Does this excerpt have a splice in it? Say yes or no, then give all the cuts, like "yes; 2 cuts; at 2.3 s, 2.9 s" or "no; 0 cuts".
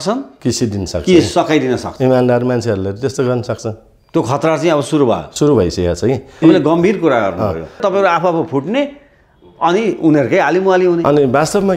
yes; 2 cuts; at 6.3 s, 7.8 s